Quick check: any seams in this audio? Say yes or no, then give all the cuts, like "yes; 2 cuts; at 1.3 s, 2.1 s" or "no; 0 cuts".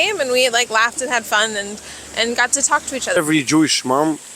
yes; 1 cut; at 3.2 s